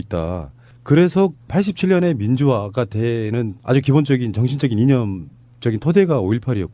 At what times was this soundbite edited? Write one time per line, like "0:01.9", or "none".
0:03.5